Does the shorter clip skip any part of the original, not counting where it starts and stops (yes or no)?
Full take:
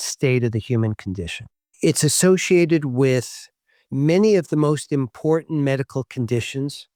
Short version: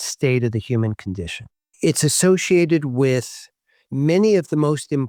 no